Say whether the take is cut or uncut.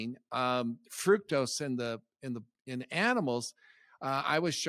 uncut